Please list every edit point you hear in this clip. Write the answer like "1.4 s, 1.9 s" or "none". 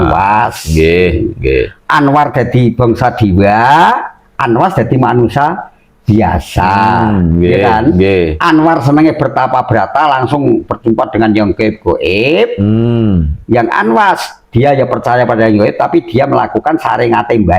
none